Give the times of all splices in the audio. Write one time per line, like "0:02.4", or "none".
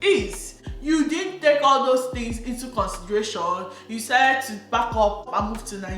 none